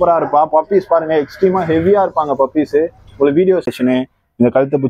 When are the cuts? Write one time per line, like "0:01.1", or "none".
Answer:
0:03.7